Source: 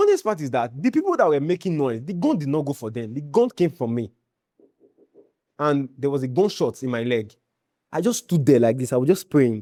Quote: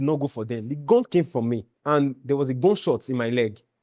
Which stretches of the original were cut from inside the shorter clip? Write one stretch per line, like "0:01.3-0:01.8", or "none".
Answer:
0:04.2-0:05.5